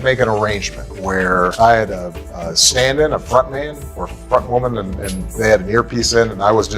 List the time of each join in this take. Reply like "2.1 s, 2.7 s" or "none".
none